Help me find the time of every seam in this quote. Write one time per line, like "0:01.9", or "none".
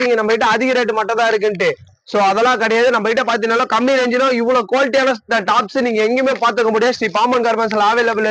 none